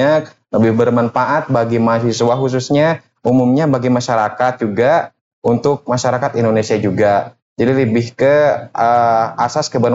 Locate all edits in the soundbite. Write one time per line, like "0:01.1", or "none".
none